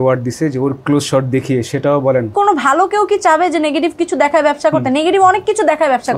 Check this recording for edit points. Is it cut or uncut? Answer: cut